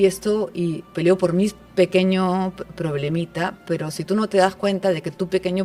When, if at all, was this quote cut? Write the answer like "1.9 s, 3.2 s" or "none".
none